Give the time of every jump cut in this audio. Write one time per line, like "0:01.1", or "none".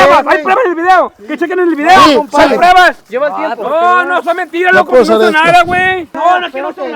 0:03.1
0:06.1

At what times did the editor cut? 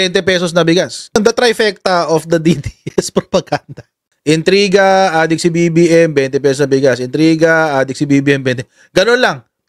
0:01.1

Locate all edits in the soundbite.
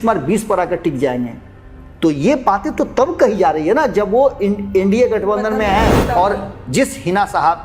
0:06.0

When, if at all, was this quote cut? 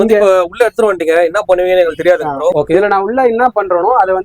0:02.5

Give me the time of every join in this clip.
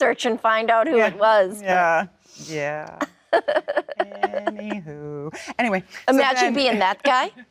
none

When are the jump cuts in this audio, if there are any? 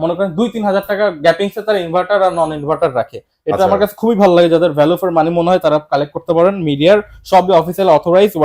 none

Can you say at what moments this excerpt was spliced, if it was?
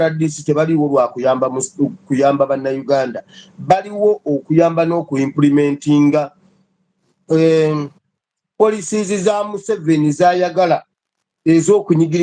none

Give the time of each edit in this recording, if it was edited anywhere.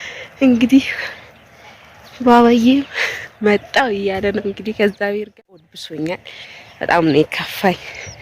0:05.3

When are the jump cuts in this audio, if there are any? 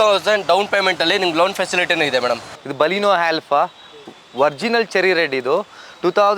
0:02.6

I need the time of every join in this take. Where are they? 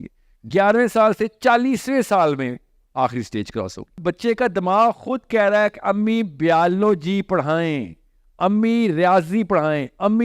0:03.9

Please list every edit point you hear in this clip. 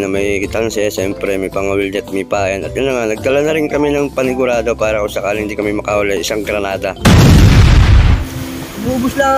0:08.2

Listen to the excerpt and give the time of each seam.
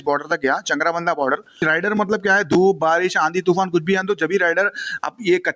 0:01.6

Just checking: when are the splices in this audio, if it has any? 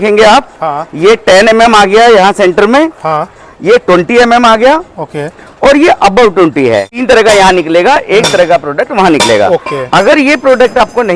0:06.9

